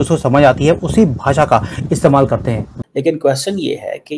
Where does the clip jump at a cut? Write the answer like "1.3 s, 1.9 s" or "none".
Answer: 2.7 s